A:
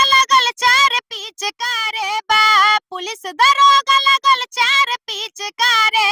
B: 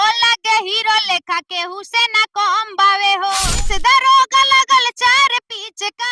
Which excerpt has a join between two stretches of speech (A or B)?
B